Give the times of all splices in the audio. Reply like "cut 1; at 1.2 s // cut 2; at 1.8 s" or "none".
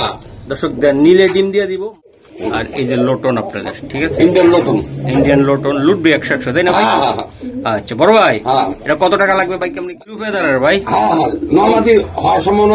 cut 1; at 1.8 s // cut 2; at 9.9 s